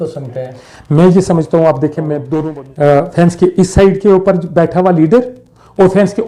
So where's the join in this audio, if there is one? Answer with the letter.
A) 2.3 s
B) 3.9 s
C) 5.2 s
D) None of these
A